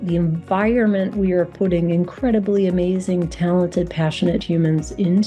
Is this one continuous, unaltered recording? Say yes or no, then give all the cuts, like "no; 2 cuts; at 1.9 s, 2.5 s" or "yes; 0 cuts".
yes; 0 cuts